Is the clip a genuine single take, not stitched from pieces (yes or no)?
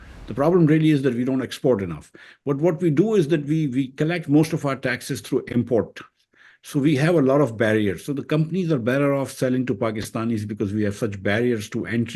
yes